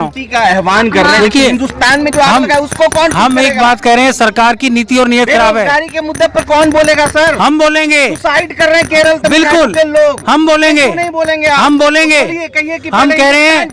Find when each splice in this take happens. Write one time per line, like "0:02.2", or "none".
none